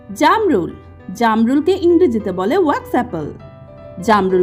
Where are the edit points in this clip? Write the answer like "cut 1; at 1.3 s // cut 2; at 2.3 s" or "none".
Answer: none